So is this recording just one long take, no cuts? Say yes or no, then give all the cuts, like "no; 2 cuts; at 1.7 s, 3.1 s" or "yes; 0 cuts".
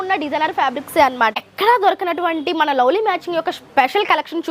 no; 1 cut; at 1.4 s